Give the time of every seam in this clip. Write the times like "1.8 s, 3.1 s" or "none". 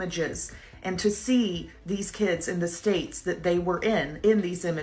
none